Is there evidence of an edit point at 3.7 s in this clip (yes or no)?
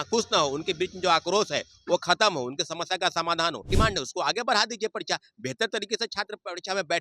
yes